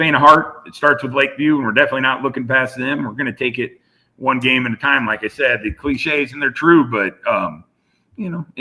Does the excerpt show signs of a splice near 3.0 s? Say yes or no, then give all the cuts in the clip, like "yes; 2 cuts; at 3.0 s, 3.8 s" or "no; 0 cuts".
no; 0 cuts